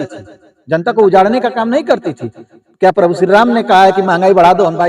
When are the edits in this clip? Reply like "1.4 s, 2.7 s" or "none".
none